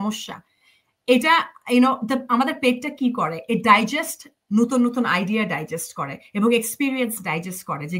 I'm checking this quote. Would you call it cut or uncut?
uncut